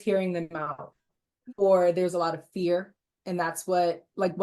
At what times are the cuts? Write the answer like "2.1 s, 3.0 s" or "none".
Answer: 1.0 s